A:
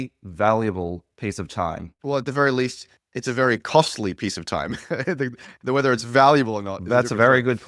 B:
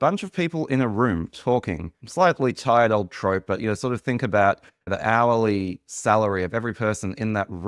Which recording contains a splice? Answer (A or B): B